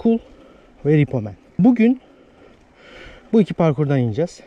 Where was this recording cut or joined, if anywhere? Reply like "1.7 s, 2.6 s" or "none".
1.6 s